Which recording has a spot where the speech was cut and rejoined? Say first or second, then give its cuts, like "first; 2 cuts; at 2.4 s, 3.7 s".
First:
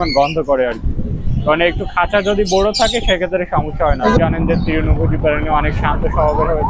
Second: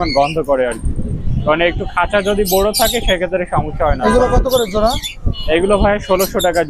first; 1 cut; at 4.2 s